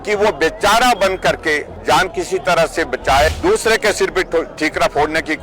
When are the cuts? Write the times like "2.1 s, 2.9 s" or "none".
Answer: 1.7 s, 3.3 s